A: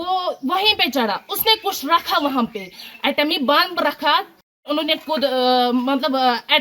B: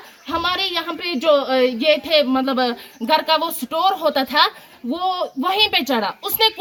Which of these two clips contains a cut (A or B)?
A